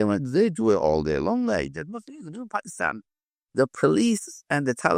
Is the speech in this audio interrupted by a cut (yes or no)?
no